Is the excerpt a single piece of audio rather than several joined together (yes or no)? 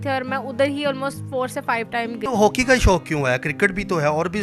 no